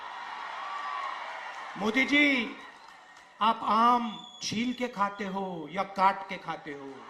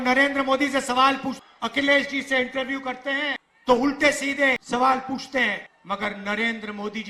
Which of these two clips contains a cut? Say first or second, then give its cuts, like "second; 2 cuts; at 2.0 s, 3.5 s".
second; 4 cuts; at 1.4 s, 3.5 s, 4.6 s, 5.7 s